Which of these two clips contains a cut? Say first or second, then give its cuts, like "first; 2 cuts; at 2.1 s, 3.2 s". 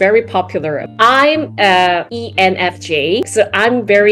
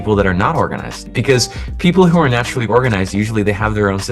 first; 3 cuts; at 0.9 s, 2.2 s, 3.3 s